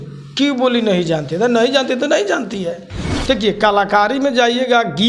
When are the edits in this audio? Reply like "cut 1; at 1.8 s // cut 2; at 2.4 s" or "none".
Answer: cut 1; at 2.9 s